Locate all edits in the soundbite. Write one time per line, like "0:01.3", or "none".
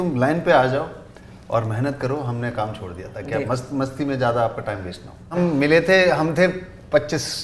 0:05.3